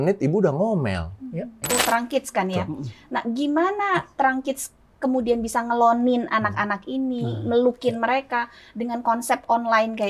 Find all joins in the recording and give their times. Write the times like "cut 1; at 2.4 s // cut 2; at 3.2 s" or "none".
cut 1; at 1.7 s